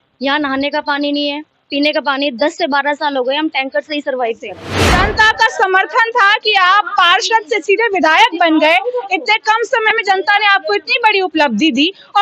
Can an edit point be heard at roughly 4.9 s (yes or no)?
yes